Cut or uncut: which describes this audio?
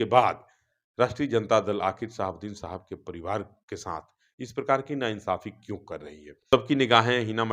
cut